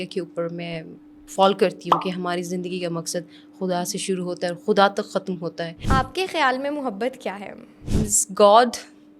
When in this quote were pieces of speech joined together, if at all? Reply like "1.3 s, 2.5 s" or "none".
5.8 s, 7.8 s